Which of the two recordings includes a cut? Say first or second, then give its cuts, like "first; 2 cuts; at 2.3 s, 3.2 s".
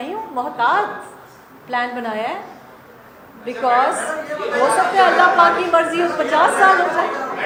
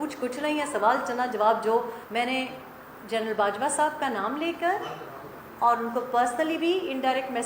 second; 1 cut; at 2.0 s